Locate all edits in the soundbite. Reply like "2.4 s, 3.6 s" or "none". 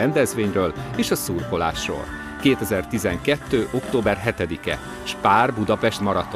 none